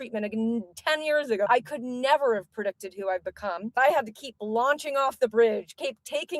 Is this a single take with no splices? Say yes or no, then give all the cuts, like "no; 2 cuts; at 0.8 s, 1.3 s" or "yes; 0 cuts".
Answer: no; 2 cuts; at 1.5 s, 3.8 s